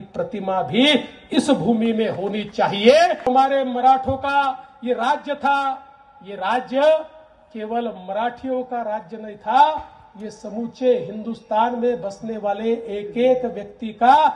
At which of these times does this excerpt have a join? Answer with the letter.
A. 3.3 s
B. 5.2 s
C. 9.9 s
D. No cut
A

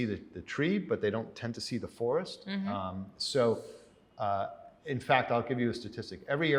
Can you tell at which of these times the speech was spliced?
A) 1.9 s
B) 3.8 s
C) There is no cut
C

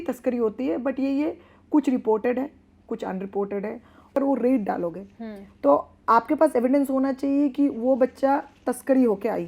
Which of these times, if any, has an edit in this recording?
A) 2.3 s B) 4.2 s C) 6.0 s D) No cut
B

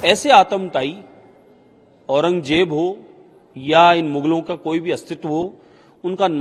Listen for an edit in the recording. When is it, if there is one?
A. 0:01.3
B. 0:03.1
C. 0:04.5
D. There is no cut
D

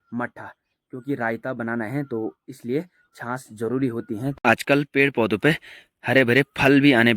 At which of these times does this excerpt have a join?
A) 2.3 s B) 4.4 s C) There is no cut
B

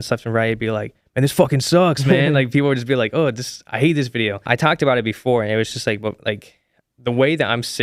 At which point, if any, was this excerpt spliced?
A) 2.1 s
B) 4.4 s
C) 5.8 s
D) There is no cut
B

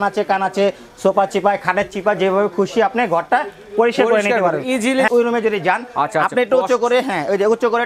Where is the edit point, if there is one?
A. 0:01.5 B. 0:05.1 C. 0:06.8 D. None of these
B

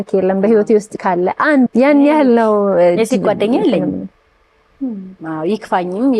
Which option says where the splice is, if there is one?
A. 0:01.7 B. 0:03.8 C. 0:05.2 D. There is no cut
A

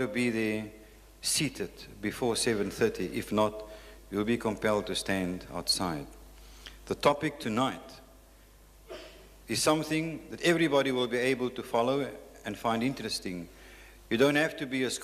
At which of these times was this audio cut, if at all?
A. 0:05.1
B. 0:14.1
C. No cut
A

